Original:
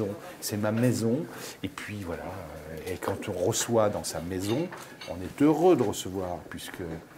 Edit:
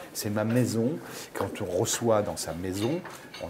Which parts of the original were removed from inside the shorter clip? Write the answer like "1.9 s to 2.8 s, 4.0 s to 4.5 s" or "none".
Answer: 1.5 s to 2.9 s